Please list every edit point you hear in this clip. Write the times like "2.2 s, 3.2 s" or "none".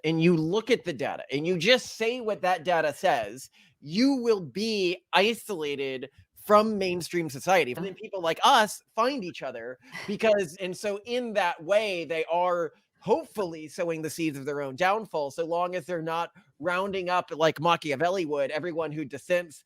7.8 s, 10.5 s